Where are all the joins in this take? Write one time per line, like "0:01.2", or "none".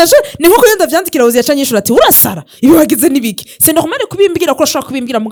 none